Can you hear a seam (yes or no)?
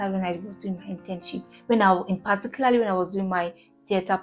no